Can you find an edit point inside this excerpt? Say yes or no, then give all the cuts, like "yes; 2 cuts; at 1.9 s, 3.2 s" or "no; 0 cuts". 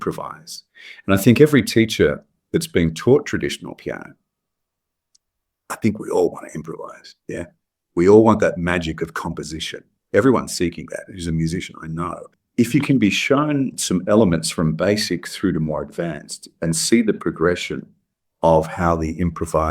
yes; 1 cut; at 12.4 s